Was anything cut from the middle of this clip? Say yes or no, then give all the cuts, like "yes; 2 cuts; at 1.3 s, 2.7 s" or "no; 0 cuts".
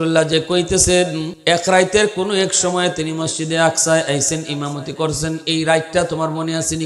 yes; 1 cut; at 1.3 s